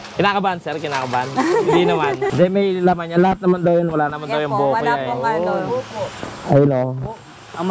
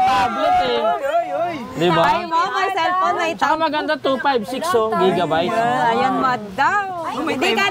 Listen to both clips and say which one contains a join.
first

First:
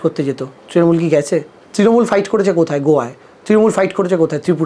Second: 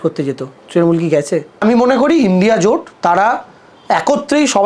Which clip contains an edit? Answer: second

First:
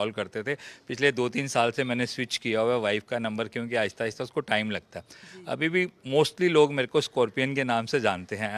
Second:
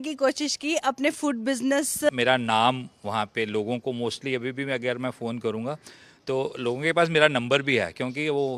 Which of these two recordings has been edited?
second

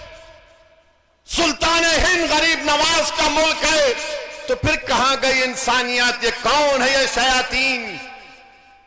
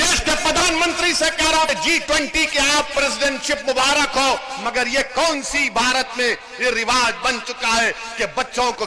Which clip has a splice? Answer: second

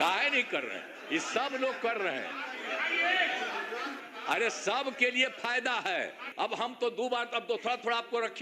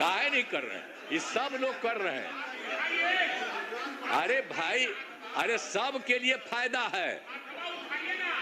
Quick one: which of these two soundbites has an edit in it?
first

